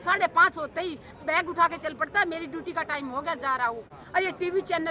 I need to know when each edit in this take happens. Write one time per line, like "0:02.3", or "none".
0:03.9

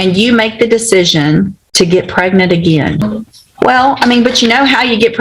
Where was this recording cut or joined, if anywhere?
0:01.6
0:03.0

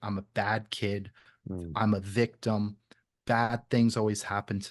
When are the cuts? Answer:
none

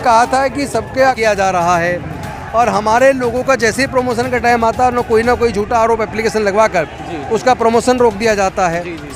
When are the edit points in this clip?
0:01.2

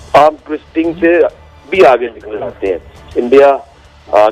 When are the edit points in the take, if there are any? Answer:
0:03.0

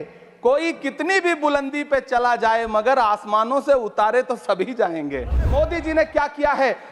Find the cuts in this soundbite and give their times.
0:05.5

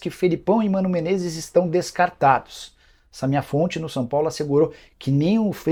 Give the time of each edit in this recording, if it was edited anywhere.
none

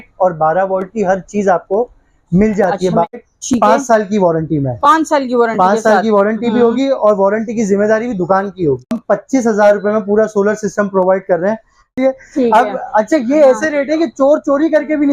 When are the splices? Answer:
0:03.2
0:08.9
0:11.9

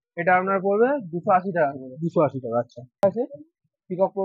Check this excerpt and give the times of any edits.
0:03.0

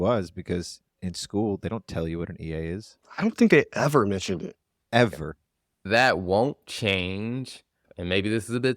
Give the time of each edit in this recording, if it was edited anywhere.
0:05.8
0:07.7

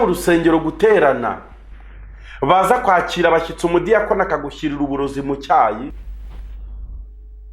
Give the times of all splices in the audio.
0:05.9

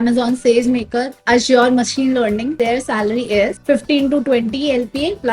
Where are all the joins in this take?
0:02.5

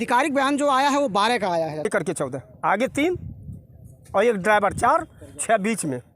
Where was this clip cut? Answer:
0:01.9

